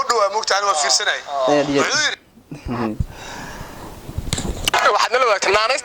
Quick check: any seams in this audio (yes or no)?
yes